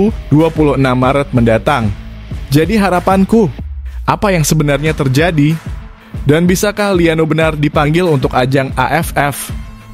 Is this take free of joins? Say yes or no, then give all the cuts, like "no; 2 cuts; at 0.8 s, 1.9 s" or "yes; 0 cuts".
yes; 0 cuts